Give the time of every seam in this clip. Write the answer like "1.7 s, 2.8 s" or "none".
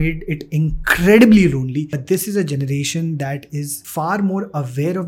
1.9 s, 3.8 s